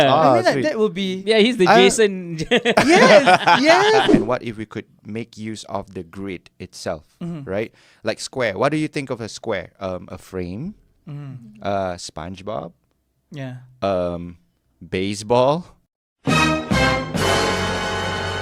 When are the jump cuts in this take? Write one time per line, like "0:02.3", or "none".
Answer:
0:04.2